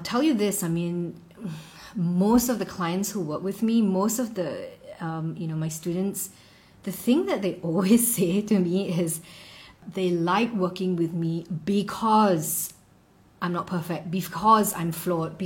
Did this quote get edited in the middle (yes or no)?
yes